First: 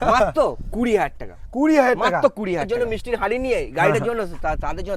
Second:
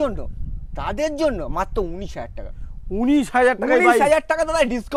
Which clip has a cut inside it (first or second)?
first